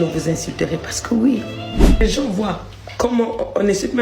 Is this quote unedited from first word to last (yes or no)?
no